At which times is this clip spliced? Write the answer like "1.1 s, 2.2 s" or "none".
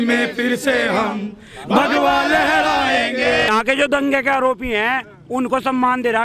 3.5 s